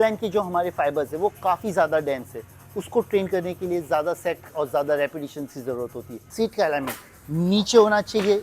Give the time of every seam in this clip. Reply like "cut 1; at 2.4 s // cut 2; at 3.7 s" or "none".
cut 1; at 6.2 s